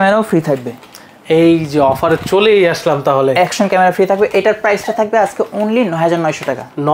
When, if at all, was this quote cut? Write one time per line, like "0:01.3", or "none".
none